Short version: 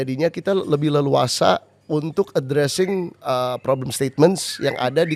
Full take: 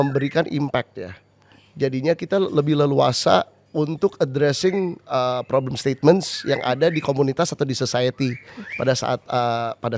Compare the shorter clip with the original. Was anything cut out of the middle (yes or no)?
no